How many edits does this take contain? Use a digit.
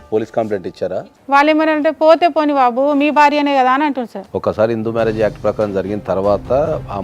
2